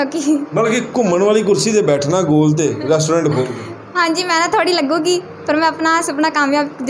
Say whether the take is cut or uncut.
uncut